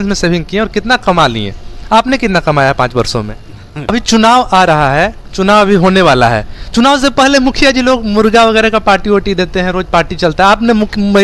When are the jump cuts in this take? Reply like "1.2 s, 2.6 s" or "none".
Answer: 3.9 s

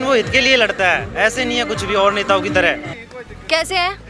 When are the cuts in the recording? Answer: 2.9 s

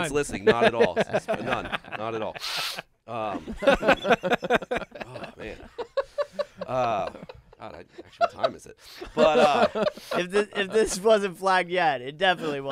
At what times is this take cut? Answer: none

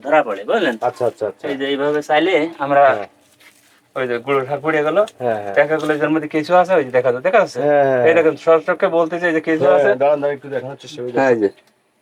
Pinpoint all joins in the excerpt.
none

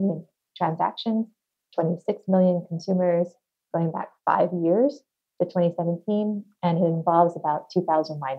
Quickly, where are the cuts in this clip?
none

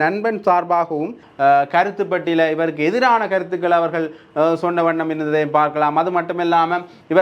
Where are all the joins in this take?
1.2 s

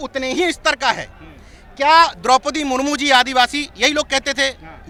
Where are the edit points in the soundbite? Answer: none

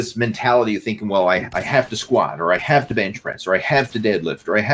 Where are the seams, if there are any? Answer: none

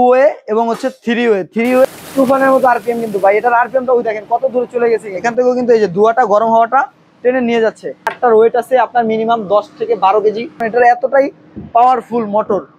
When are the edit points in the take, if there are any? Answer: 1.8 s, 5.1 s, 8.1 s, 10.6 s

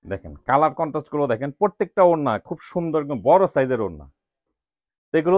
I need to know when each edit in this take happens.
none

